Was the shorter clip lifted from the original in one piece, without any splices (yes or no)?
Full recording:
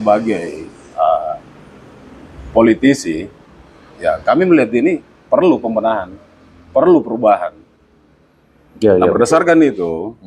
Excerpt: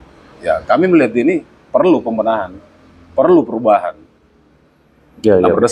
yes